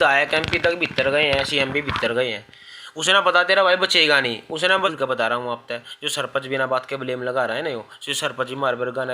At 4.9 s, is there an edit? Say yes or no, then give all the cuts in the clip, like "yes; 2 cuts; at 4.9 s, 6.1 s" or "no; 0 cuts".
yes; 1 cut; at 4.9 s